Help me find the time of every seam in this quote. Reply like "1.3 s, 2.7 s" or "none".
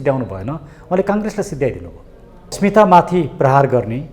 2.6 s